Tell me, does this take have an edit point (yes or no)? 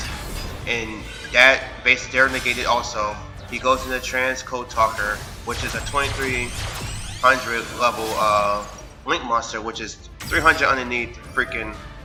no